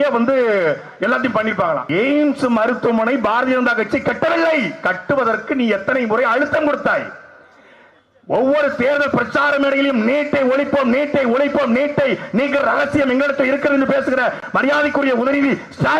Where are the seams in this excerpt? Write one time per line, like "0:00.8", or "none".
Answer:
0:01.8

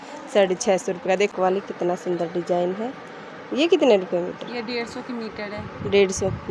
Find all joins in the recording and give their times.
0:01.3

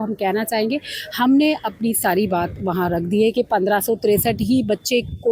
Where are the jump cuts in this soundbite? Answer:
none

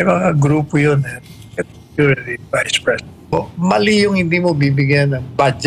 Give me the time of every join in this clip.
0:03.3

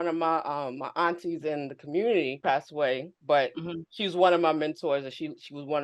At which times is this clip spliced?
none

